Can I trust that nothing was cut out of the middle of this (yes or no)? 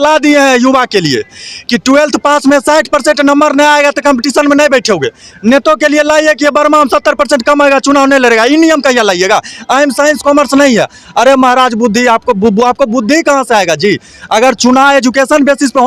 yes